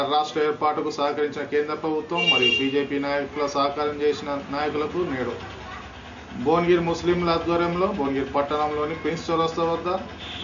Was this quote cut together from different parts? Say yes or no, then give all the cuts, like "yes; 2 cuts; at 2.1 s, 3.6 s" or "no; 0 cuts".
no; 0 cuts